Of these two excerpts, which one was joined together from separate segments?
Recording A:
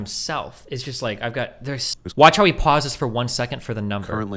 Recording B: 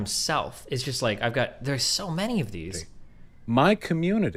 A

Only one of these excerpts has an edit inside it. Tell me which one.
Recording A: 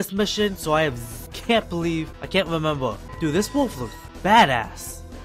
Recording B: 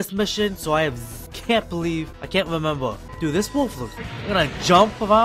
A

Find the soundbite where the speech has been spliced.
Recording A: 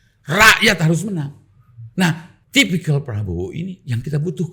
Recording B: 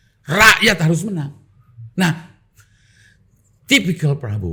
A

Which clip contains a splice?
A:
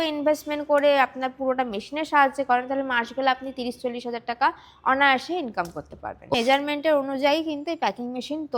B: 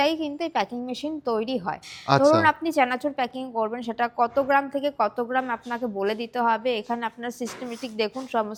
A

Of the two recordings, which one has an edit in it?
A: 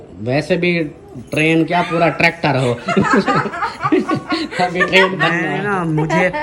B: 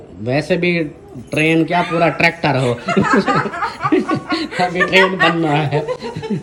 A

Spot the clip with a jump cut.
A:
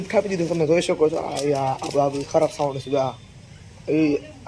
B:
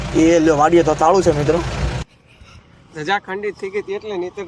B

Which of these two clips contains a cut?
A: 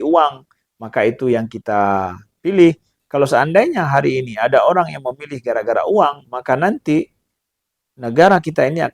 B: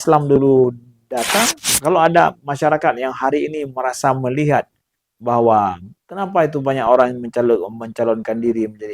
B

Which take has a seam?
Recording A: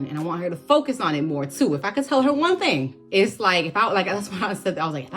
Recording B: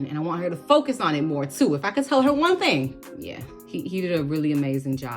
B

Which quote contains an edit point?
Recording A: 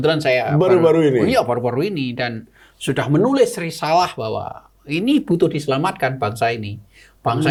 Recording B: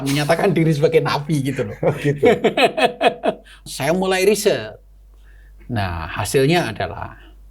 B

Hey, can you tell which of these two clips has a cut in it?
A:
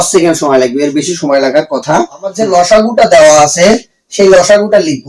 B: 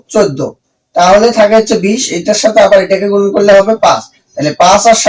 A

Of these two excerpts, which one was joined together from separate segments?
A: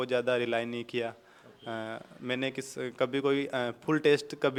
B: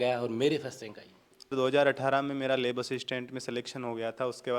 B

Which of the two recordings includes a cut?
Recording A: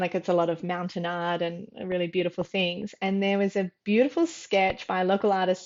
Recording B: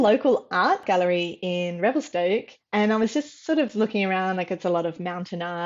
B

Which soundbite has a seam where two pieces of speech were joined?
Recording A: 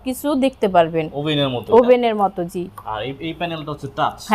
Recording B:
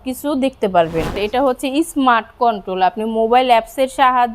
B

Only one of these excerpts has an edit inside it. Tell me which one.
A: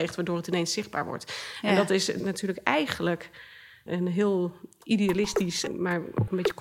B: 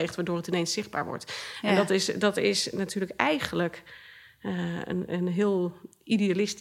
A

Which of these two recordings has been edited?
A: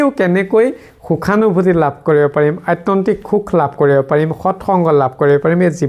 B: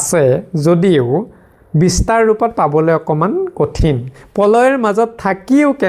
B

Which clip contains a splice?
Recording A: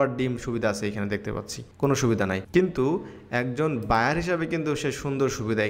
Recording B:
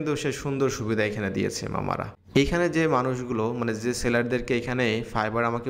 B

